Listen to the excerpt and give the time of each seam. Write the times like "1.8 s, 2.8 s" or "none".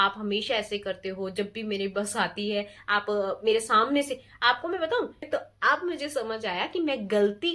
5.3 s